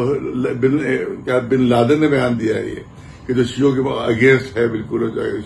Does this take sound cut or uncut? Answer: uncut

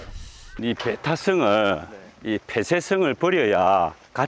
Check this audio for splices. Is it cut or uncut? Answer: uncut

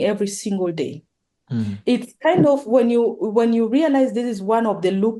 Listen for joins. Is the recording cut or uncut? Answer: uncut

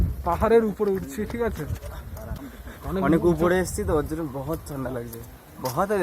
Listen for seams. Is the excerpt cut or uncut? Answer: cut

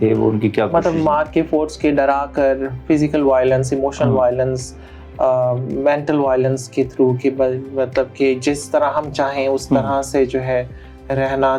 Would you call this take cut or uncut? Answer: uncut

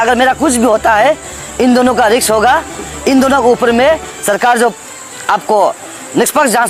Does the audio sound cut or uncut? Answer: uncut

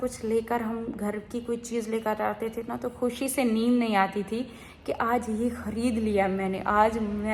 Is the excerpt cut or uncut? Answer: uncut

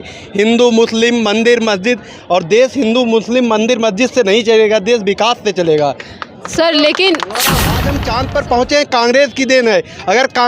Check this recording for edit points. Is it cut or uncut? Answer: cut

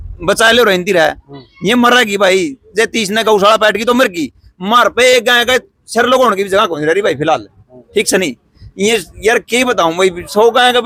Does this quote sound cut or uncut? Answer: uncut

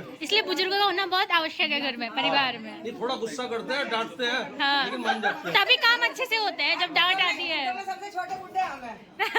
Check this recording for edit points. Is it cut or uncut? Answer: uncut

